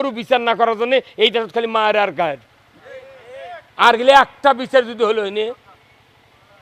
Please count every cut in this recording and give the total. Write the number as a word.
zero